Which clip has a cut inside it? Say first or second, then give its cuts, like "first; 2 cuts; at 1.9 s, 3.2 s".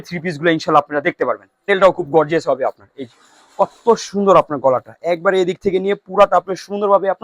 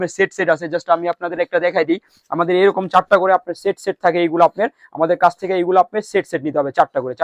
first; 1 cut; at 1.7 s